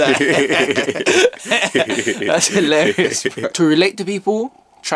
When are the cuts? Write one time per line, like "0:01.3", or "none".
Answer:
none